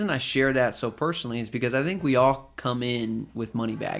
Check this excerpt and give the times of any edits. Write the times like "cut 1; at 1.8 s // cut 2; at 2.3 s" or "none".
none